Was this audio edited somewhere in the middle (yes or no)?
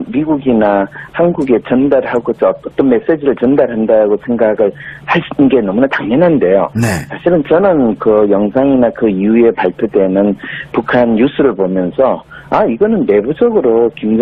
no